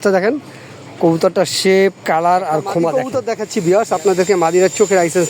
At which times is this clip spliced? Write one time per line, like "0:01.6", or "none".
0:03.1